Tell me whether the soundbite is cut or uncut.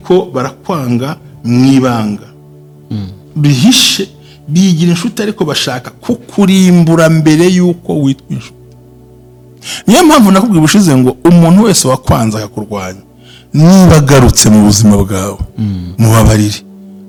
uncut